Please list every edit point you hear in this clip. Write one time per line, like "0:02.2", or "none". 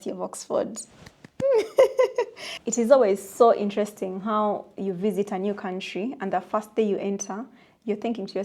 0:02.4